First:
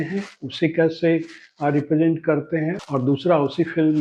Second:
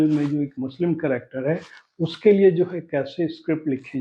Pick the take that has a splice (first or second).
first